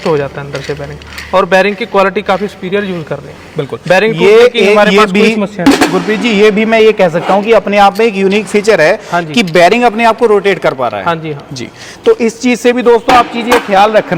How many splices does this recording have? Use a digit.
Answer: 0